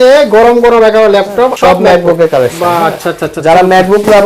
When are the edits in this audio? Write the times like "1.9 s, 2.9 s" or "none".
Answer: 1.5 s